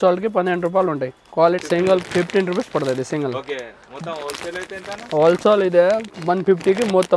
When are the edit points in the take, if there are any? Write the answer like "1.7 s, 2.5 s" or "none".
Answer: 1.6 s